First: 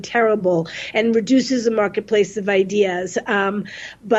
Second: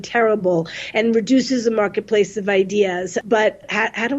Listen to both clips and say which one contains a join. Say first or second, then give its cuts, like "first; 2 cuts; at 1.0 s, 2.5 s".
second; 1 cut; at 3.2 s